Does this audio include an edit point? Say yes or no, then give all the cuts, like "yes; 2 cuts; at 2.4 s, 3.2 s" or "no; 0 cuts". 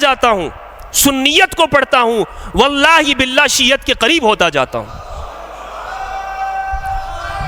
no; 0 cuts